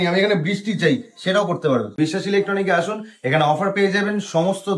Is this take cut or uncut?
cut